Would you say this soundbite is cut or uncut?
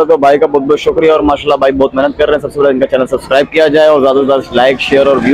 uncut